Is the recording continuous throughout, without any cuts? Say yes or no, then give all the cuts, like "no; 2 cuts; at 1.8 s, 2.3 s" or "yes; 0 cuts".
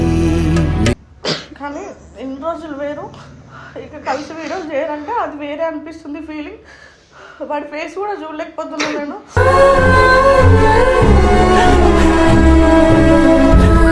no; 1 cut; at 1.1 s